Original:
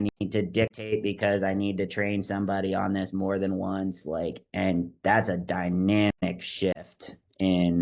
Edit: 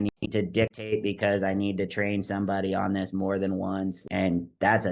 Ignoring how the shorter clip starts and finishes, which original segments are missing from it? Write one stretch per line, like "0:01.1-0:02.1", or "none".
0:04.0-0:04.4